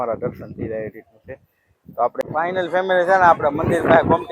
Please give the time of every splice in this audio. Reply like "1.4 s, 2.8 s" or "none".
2.2 s